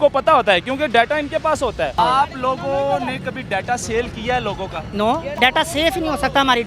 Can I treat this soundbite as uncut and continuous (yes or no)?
no